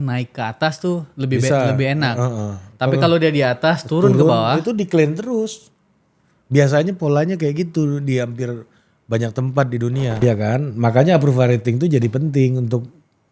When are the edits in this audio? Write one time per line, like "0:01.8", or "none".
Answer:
0:10.2